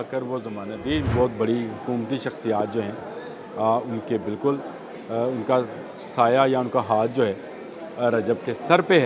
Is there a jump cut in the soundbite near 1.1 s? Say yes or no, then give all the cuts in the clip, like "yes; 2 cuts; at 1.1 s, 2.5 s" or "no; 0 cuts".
yes; 1 cut; at 1.1 s